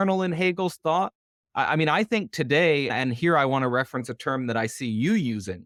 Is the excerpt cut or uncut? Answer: uncut